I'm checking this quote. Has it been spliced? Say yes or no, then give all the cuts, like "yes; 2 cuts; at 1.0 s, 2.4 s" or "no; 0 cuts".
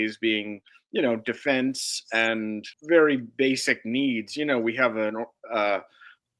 yes; 1 cut; at 2.7 s